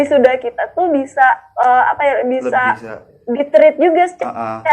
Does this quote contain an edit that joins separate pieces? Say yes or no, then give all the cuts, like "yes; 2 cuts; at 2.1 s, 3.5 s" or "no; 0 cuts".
no; 0 cuts